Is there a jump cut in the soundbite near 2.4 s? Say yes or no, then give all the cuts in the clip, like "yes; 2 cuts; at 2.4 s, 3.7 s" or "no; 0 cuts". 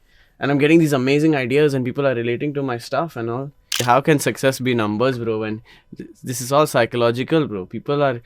no; 1 cut; at 3.8 s